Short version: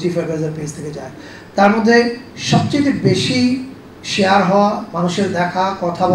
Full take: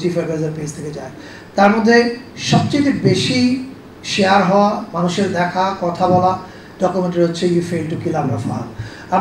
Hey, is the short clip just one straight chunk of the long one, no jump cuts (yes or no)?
yes